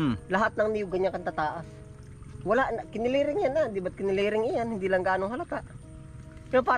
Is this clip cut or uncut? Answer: uncut